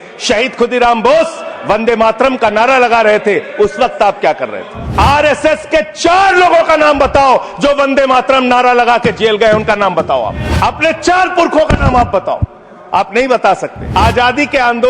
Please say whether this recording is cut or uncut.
cut